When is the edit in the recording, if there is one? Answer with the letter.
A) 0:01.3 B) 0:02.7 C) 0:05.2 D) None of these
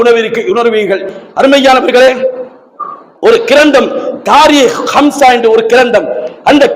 D